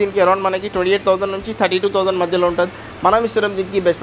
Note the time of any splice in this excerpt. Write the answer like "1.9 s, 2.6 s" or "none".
none